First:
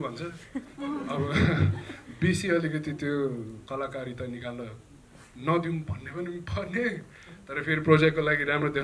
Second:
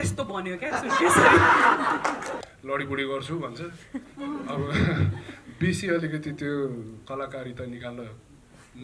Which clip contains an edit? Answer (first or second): second